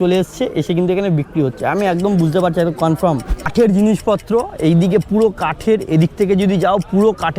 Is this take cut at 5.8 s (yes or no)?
no